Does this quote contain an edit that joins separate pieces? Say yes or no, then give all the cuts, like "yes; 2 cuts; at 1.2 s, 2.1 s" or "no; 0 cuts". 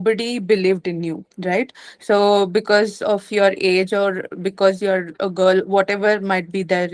no; 0 cuts